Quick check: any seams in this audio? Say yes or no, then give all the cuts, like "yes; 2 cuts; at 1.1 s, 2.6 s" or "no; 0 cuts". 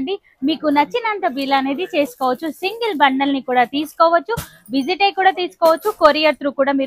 no; 0 cuts